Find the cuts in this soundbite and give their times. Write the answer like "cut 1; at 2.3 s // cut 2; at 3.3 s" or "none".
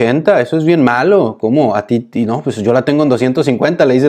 none